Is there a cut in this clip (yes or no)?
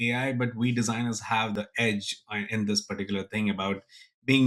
yes